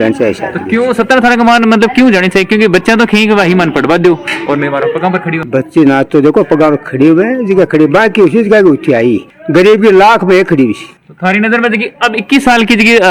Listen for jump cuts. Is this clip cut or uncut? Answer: uncut